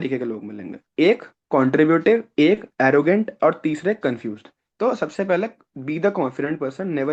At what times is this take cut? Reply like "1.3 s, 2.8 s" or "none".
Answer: none